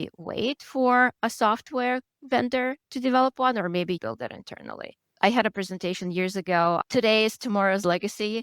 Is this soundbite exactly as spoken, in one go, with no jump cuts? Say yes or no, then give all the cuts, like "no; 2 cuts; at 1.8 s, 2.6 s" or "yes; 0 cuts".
yes; 0 cuts